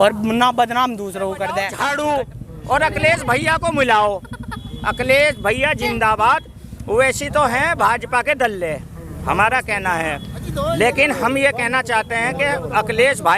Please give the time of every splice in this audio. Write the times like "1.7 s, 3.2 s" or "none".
1.7 s